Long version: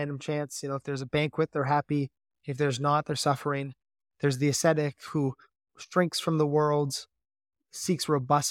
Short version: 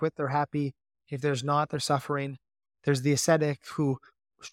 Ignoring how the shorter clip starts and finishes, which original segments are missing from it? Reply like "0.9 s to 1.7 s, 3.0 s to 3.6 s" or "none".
none